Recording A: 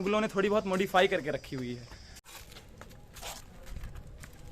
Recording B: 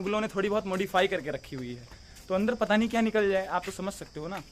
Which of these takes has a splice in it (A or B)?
A